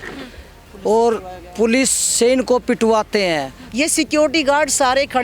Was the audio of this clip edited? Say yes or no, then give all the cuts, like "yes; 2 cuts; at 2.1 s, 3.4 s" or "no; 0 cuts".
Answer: yes; 1 cut; at 3.6 s